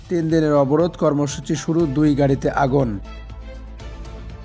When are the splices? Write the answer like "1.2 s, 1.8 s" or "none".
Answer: 3.4 s